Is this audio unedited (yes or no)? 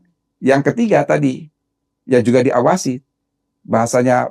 yes